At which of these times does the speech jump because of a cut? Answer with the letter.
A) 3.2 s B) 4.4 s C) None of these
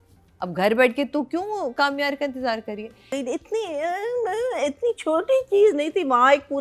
A